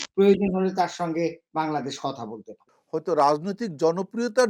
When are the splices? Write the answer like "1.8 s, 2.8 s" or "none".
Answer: 2.7 s

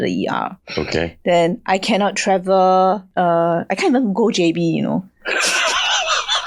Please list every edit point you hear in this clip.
3.1 s

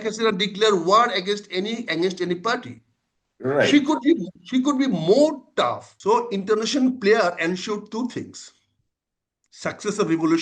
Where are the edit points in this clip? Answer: 5.9 s

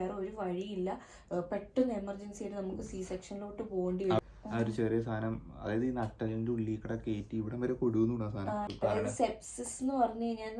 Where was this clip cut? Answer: 4.2 s, 8.7 s

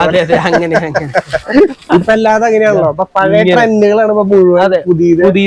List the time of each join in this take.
none

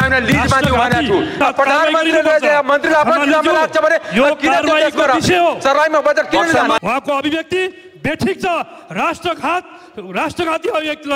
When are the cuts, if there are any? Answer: 1.4 s, 6.8 s

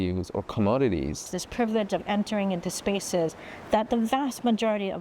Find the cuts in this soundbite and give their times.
1.4 s

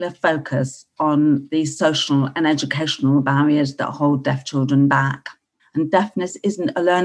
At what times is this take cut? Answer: 5.5 s

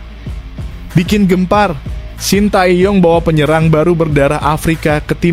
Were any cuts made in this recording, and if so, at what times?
0.9 s

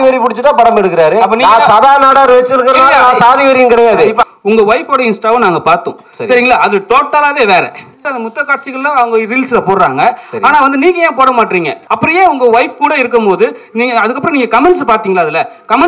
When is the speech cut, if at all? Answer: 4.2 s, 8.1 s, 11.8 s

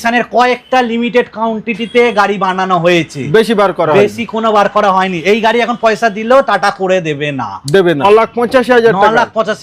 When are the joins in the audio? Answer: 8.0 s

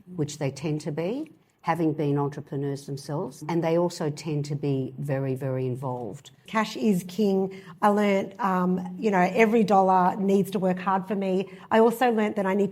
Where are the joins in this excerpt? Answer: 3.4 s, 6.4 s

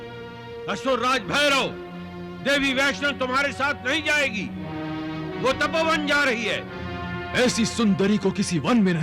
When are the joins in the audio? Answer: none

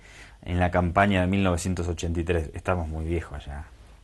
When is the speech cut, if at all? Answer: none

